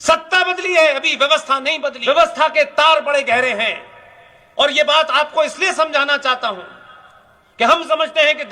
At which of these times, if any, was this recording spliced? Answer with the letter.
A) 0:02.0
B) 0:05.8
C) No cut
A